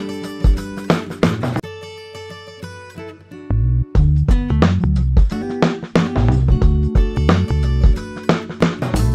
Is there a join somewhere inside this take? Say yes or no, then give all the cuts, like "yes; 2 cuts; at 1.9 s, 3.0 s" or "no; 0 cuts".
yes; 1 cut; at 1.6 s